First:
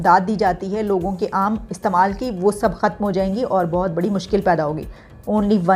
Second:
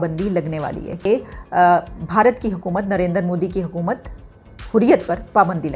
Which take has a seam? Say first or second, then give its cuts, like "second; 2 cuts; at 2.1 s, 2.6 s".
second; 1 cut; at 1.1 s